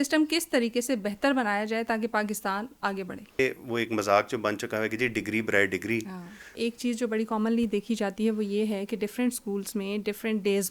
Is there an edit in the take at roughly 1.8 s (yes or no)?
no